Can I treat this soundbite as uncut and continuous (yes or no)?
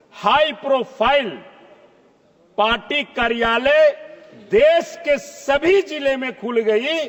yes